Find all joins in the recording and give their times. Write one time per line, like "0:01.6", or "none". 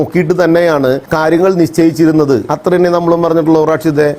0:01.1
0:02.4